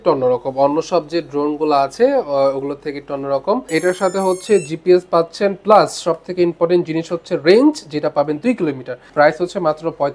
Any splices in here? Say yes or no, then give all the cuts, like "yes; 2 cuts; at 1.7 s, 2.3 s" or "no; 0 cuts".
yes; 2 cuts; at 3.7 s, 8.9 s